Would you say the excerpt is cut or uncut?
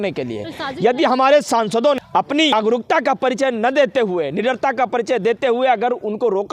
cut